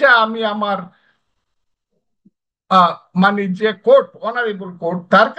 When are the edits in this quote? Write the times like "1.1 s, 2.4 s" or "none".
none